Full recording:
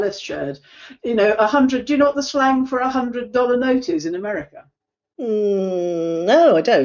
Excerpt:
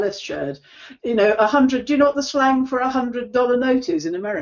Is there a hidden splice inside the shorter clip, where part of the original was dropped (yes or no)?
no